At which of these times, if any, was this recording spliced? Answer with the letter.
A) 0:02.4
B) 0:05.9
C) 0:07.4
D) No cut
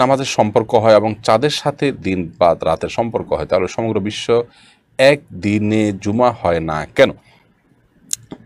D